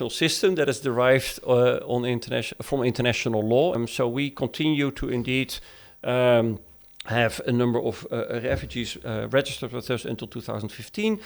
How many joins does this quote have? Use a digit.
1